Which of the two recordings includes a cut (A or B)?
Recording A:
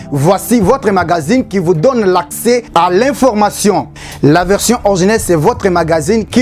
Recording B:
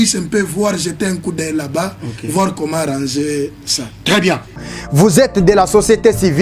B